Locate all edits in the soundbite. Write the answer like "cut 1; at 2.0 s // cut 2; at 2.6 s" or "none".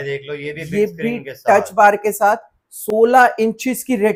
none